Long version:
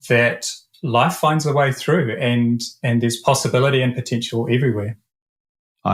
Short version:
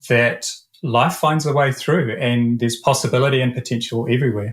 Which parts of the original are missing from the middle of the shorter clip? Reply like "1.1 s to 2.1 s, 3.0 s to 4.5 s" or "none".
2.6 s to 3.0 s